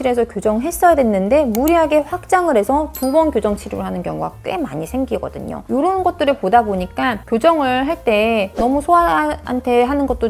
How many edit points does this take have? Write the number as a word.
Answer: zero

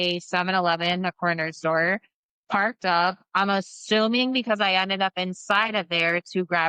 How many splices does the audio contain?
zero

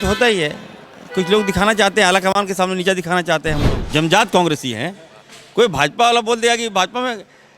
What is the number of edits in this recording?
one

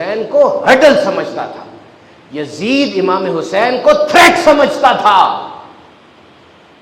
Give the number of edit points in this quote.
zero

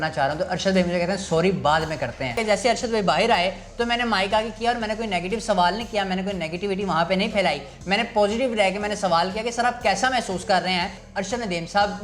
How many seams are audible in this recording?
two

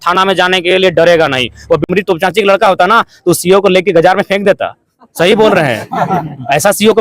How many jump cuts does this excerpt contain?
one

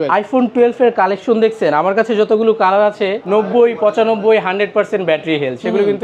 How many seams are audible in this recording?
one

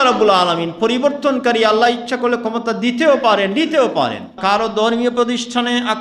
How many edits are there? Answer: one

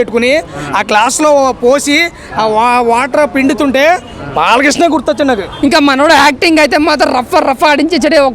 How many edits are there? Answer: one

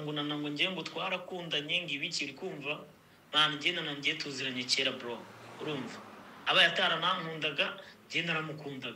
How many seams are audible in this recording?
zero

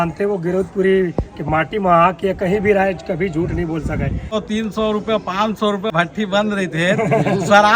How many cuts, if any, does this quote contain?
two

